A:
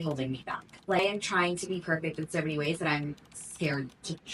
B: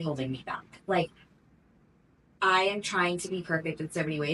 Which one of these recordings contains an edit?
A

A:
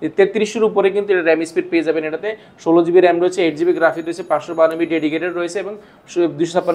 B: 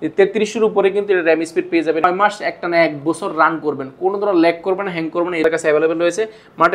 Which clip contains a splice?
B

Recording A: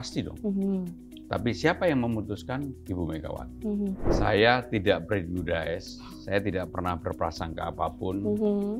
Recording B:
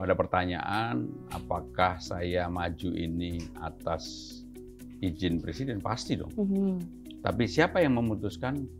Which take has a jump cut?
A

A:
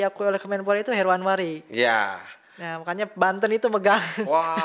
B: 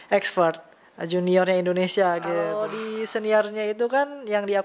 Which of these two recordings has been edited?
B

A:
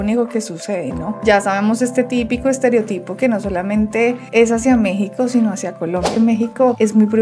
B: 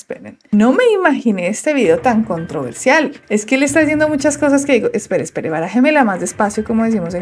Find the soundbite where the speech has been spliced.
A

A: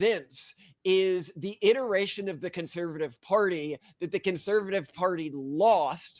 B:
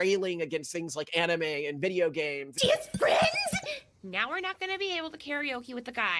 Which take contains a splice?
B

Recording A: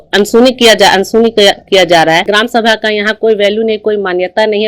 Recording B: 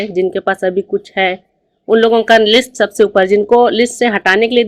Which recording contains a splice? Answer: A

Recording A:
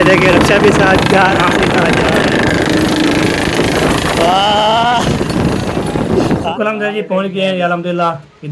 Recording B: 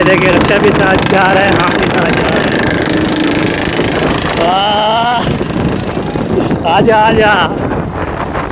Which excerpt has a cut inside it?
A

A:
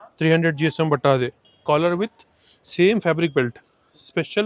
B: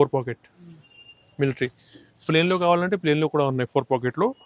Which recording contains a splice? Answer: A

